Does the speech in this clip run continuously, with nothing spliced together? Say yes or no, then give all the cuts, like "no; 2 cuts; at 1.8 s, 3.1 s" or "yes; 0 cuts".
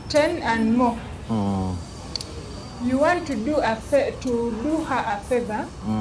yes; 0 cuts